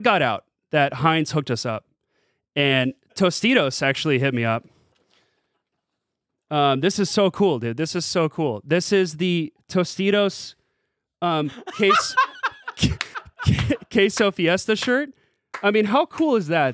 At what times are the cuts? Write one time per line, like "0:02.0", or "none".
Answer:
none